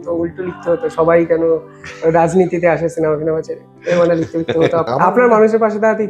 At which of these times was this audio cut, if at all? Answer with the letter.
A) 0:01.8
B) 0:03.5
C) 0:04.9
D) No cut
C